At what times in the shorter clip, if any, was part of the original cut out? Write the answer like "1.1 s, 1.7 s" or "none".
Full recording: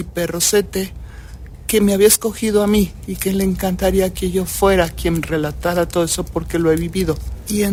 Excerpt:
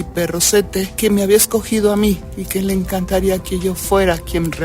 0.9 s